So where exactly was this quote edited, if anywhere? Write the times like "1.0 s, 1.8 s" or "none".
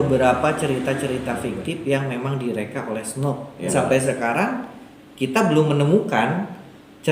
3.7 s